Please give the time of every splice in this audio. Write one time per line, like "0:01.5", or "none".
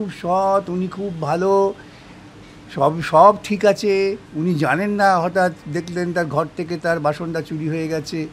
none